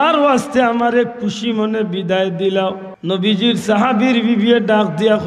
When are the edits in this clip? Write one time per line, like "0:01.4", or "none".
0:02.9

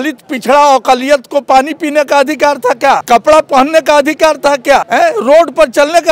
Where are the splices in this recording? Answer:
0:03.0
0:04.9

